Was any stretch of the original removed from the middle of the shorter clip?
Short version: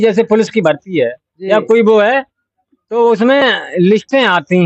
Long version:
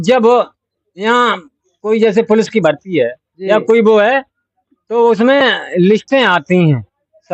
no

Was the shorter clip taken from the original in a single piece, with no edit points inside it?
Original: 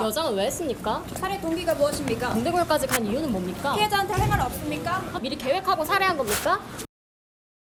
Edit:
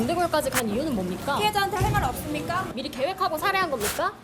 no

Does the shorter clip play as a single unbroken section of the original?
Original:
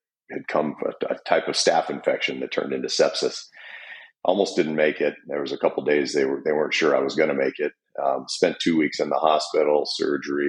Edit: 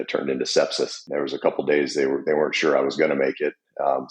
no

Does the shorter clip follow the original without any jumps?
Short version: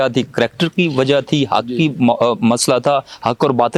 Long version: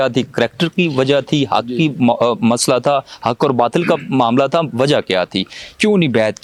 yes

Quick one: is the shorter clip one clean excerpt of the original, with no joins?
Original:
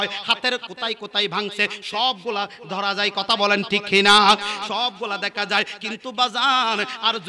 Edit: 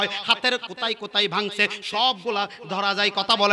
yes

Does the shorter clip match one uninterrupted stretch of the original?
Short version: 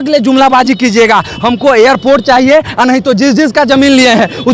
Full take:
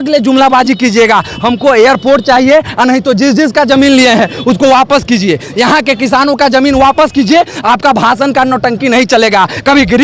yes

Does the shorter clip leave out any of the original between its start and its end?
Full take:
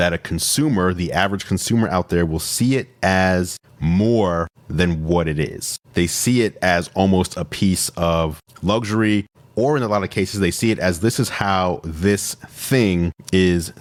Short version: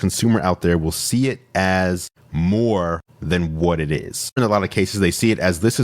yes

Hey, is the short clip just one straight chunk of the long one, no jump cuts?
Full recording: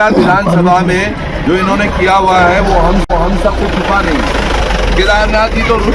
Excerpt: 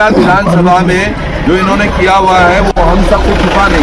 no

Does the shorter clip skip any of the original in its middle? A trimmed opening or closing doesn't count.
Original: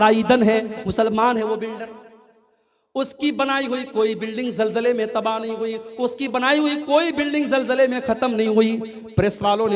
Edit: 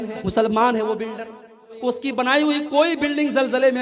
yes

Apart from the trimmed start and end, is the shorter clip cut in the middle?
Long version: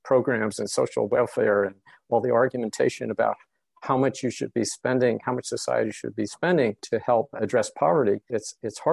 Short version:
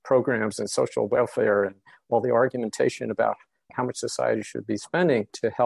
yes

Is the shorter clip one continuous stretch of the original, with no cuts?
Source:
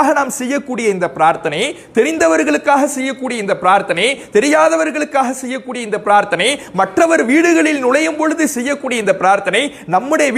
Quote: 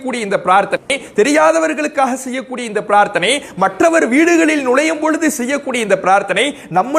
yes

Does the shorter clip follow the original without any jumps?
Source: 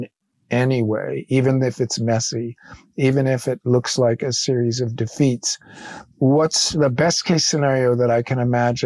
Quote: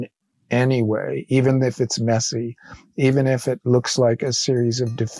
yes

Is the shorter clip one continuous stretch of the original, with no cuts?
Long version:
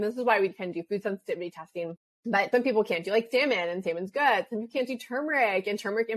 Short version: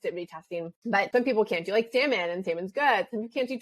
no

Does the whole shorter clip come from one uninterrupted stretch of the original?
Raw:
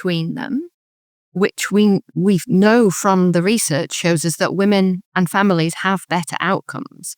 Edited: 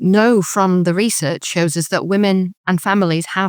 yes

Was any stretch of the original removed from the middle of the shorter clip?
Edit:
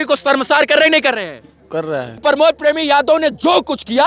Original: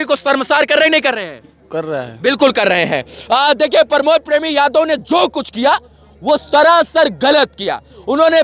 yes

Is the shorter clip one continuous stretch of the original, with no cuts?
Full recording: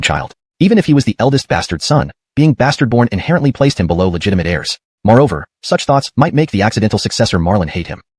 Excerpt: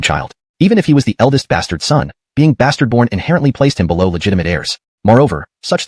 yes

